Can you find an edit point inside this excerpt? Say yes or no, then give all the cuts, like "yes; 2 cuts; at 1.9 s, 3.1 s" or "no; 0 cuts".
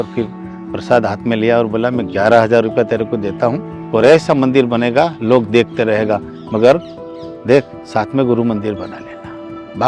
no; 0 cuts